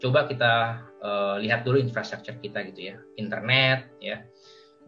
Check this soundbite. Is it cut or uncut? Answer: uncut